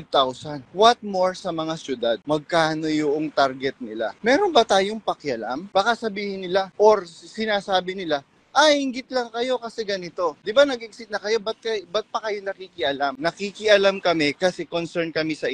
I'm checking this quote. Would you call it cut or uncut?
uncut